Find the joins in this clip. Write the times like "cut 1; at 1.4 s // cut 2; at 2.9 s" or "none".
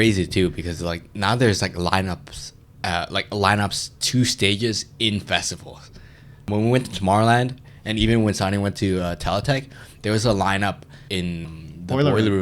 cut 1; at 6.4 s